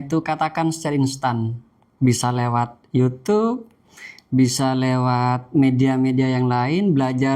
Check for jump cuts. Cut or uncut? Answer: uncut